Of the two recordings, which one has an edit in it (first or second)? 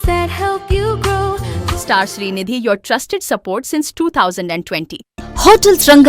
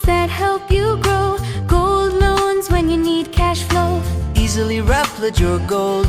first